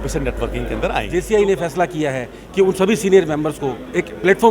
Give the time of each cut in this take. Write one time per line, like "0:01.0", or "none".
0:01.1